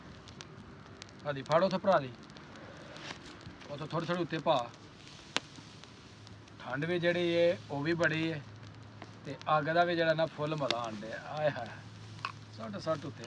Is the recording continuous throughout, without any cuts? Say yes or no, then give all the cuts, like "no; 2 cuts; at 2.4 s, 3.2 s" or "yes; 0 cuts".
yes; 0 cuts